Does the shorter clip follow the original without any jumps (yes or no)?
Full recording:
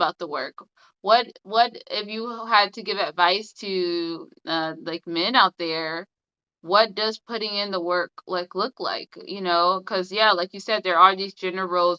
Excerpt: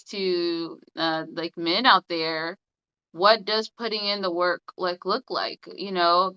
yes